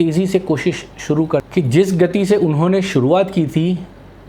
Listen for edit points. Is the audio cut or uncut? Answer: cut